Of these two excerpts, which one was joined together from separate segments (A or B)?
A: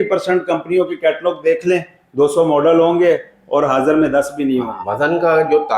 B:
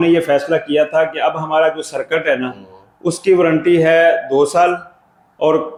A